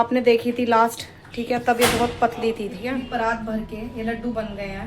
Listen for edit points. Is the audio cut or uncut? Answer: cut